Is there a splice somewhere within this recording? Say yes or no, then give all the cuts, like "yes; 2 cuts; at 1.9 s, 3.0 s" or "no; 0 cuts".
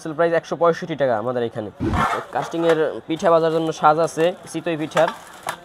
yes; 2 cuts; at 1.8 s, 4.4 s